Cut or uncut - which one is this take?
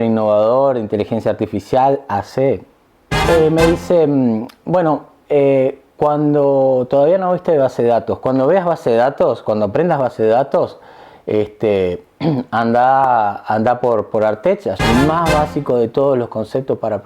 cut